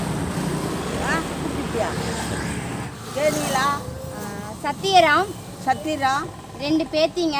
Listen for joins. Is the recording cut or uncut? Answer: cut